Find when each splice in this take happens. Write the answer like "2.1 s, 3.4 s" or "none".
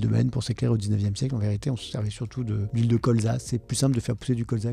2.0 s